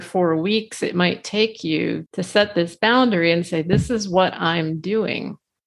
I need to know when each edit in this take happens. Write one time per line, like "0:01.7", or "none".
0:02.0